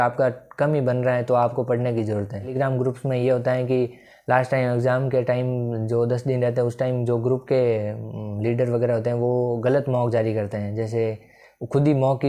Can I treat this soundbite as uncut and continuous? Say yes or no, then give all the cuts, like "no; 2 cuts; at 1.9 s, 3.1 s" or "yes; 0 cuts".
no; 1 cut; at 2.5 s